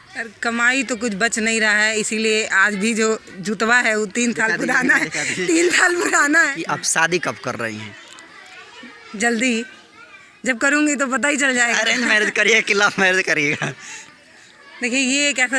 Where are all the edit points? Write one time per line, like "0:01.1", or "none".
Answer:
0:06.5

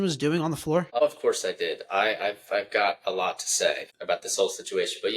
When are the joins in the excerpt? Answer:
0:00.9
0:03.9

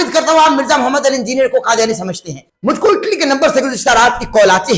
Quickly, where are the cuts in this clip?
0:02.6

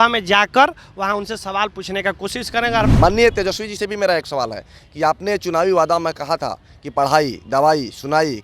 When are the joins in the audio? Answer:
0:02.9

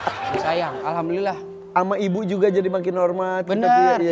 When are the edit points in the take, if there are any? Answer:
none

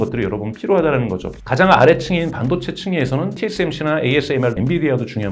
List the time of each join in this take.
0:03.4
0:04.6

